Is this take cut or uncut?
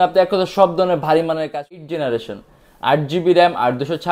cut